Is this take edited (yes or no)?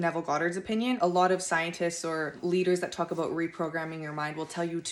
yes